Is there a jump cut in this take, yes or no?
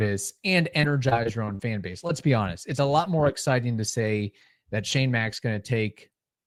no